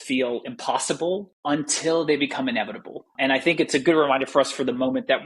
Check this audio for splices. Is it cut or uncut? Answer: uncut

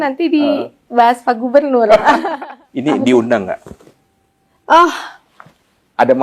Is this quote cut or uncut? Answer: cut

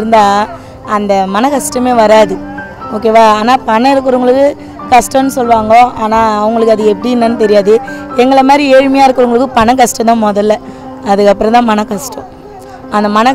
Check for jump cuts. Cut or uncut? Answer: uncut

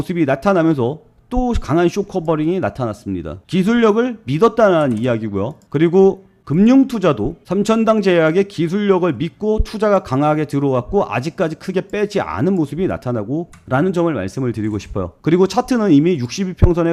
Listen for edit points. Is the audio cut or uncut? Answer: uncut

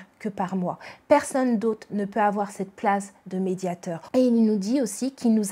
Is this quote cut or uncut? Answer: cut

